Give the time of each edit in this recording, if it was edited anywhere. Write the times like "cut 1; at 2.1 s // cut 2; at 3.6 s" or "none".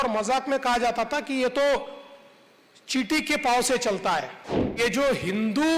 cut 1; at 4.8 s

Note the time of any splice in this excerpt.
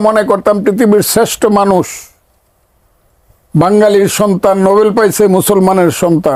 none

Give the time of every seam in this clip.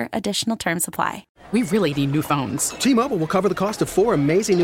cut 1; at 1.3 s

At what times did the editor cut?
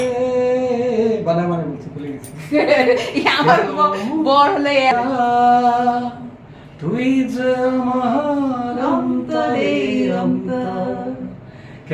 cut 1; at 4.9 s

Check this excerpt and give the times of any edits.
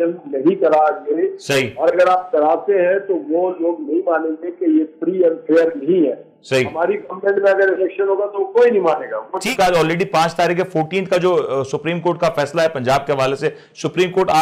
cut 1; at 9.5 s

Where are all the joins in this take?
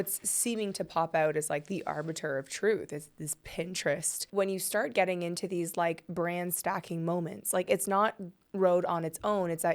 cut 1; at 4.2 s

